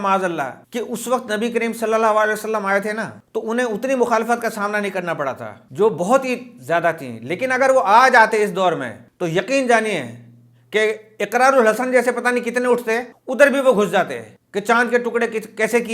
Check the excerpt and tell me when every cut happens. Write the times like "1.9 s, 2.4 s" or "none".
none